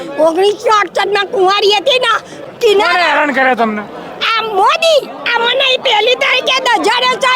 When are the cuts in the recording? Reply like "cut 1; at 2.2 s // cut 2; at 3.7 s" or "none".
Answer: cut 1; at 2.3 s

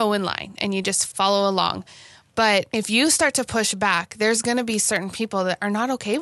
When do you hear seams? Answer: cut 1; at 1.0 s // cut 2; at 2.7 s

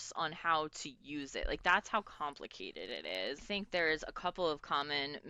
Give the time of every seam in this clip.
cut 1; at 3.4 s

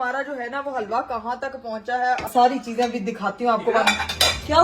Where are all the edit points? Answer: cut 1; at 2.3 s

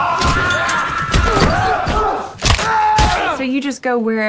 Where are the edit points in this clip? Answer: cut 1; at 3.4 s

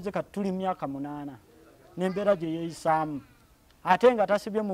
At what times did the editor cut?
none

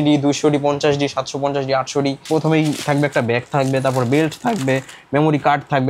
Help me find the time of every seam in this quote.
cut 1; at 2.2 s

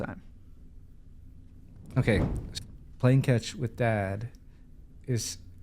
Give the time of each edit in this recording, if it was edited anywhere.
cut 1; at 2.4 s

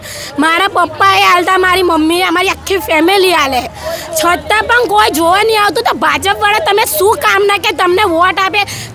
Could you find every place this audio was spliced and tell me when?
none

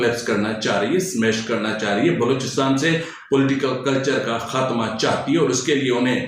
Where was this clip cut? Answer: none

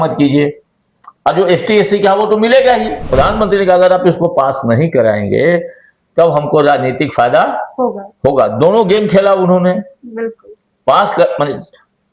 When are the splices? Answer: cut 1; at 3.1 s

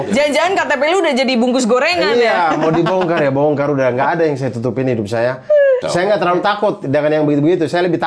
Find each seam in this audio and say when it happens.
cut 1; at 5.8 s

